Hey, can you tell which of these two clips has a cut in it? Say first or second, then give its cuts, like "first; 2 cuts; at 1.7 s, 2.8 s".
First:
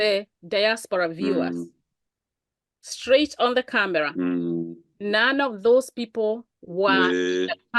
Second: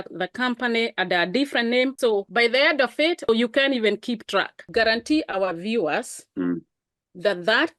second; 3 cuts; at 2.0 s, 3.3 s, 4.7 s